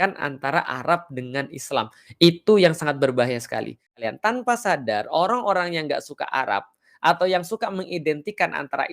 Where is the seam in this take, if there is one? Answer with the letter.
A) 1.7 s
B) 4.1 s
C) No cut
B